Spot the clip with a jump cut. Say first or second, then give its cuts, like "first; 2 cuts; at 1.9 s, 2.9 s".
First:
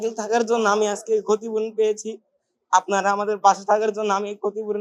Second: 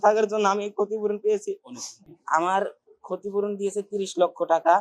second; 1 cut; at 2.2 s